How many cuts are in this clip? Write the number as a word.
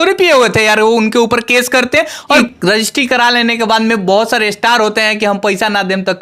one